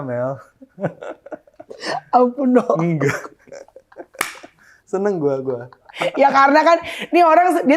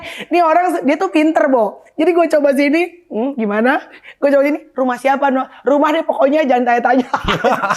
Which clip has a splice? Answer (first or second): first